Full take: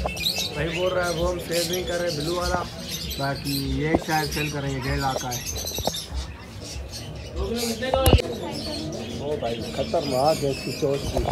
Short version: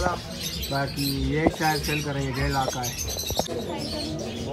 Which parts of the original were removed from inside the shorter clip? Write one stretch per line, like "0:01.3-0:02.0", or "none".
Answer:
0:06.0-0:08.2